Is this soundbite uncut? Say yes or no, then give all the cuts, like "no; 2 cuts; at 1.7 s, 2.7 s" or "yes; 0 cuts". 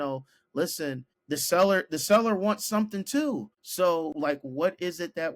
no; 3 cuts; at 1.1 s, 3.6 s, 4.1 s